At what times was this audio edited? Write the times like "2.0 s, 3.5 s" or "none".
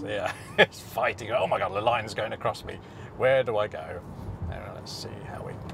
none